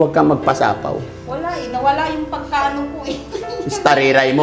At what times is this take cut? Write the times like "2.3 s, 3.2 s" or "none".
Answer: none